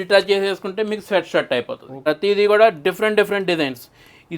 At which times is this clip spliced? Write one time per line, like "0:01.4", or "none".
0:02.0